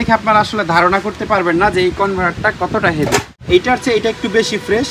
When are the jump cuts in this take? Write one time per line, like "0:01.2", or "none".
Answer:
0:03.3